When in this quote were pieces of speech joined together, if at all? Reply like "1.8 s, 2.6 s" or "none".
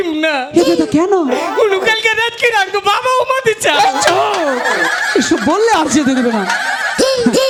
none